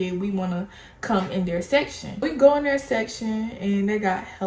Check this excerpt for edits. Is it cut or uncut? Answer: cut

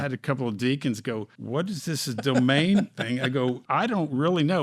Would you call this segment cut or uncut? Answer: cut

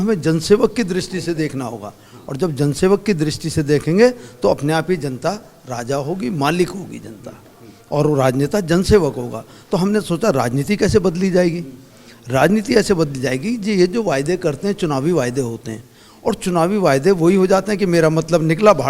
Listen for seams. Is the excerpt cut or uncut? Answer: uncut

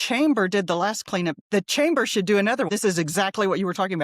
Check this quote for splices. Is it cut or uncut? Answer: cut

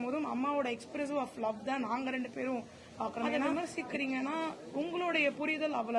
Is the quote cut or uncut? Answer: cut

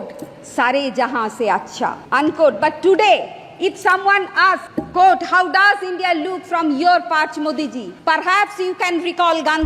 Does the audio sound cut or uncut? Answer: cut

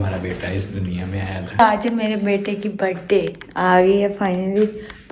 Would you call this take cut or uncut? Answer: cut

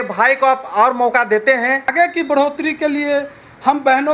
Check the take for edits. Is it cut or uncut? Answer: cut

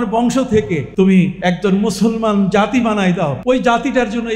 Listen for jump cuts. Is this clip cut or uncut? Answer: cut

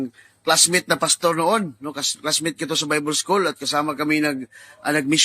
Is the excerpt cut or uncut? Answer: cut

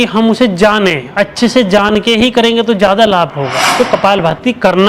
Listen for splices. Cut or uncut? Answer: cut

